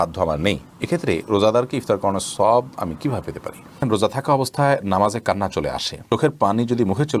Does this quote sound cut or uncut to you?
cut